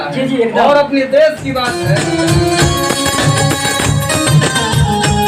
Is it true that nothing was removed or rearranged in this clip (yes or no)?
no